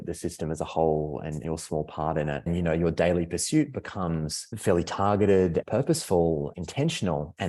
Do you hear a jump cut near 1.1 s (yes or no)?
no